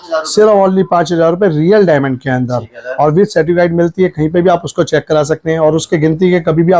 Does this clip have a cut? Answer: no; 0 cuts

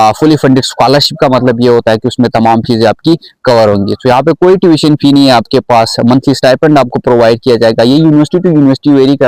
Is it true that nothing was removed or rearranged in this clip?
yes; 0 cuts

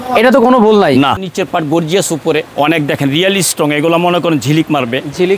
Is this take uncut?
no; 2 cuts; at 1.2 s, 2.5 s

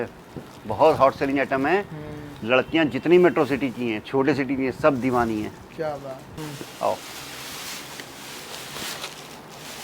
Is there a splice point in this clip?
yes; 1 cut; at 6.3 s

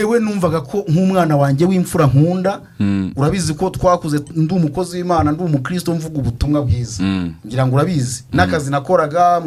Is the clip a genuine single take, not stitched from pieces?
yes; 0 cuts

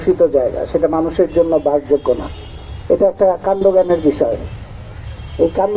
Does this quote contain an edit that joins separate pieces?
no; 0 cuts

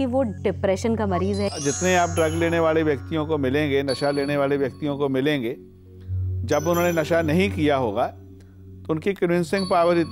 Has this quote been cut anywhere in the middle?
yes; 1 cut; at 1.5 s

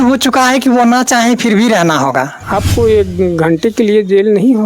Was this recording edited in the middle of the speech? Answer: yes; 1 cut; at 2.4 s

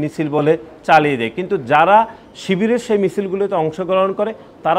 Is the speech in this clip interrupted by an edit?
no; 0 cuts

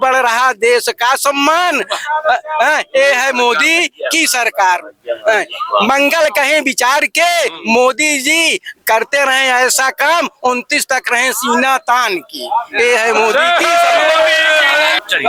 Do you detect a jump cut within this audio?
no; 0 cuts

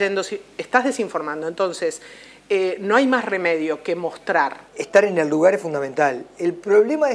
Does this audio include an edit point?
no; 0 cuts

